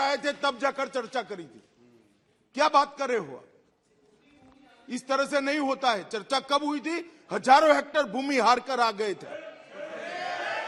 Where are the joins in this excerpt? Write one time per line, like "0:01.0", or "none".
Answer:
none